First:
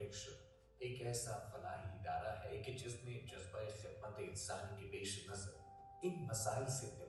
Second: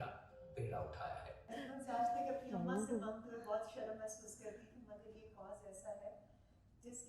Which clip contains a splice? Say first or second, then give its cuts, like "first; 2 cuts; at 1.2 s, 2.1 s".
second; 1 cut; at 1.4 s